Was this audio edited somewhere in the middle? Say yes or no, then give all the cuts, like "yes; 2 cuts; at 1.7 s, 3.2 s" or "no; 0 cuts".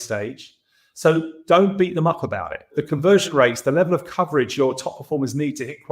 yes; 1 cut; at 2.8 s